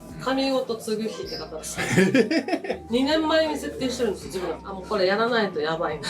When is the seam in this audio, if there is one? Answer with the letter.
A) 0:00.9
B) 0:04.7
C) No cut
B